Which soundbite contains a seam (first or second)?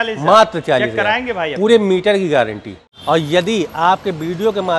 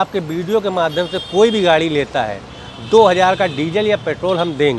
first